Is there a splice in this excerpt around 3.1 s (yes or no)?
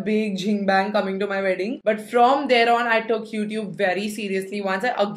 no